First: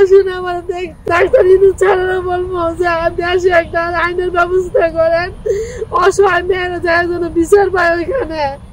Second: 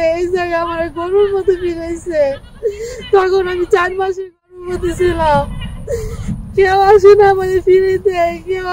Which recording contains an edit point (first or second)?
first